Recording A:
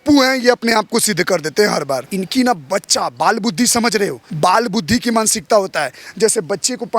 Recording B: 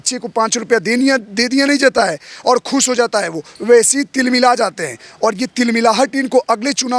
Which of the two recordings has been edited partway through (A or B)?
A